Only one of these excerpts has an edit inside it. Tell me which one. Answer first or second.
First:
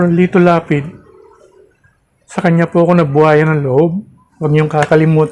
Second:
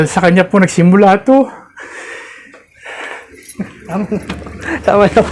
first